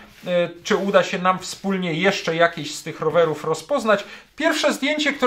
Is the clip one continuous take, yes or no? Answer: no